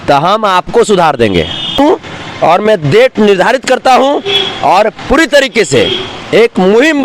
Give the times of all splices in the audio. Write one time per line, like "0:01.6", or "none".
0:01.8